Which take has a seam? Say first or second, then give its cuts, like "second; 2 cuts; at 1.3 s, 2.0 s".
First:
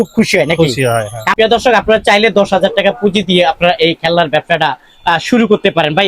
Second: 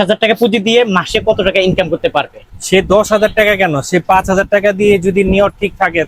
first; 1 cut; at 1.2 s